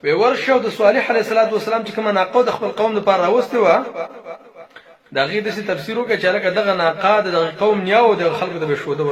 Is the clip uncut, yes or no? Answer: yes